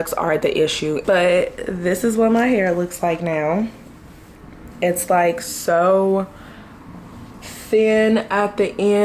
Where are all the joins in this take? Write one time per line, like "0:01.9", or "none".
0:01.0